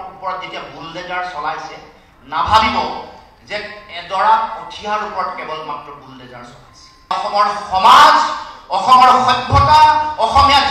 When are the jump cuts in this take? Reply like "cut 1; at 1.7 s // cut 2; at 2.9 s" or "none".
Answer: cut 1; at 7.1 s